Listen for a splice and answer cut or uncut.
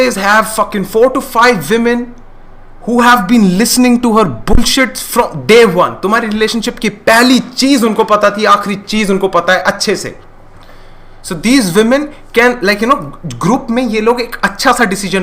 uncut